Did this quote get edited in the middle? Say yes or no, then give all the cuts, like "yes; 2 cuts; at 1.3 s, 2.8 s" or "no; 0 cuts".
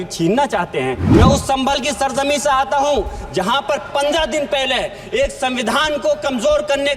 yes; 1 cut; at 1.0 s